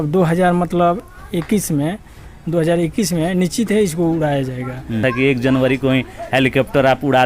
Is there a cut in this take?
yes; 1 cut; at 5.0 s

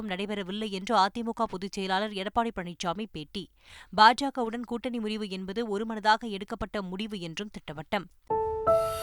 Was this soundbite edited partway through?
yes; 1 cut; at 8.0 s

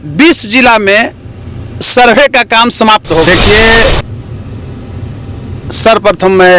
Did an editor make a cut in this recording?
yes; 1 cut; at 3.3 s

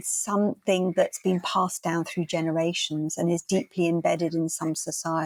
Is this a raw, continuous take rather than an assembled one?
yes; 0 cuts

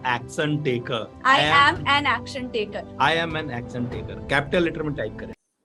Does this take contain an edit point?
no; 0 cuts

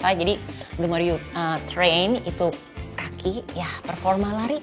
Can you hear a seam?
no; 0 cuts

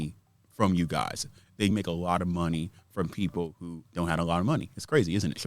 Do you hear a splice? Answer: yes; 2 cuts; at 1.7 s, 3.8 s

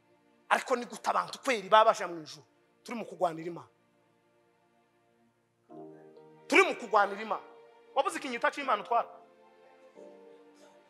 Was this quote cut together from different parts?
no; 0 cuts

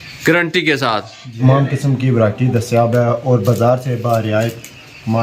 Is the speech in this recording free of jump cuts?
no; 1 cut; at 1.4 s

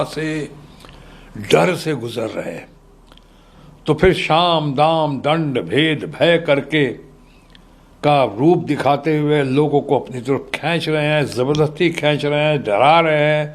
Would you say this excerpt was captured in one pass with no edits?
yes; 0 cuts

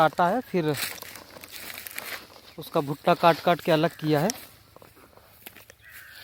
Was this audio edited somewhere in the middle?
no; 0 cuts

